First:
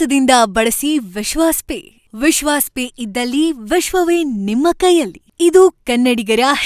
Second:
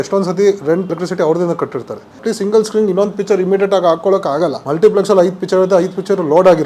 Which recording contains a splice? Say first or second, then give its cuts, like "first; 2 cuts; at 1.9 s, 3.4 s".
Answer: second; 3 cuts; at 0.9 s, 2.1 s, 4.6 s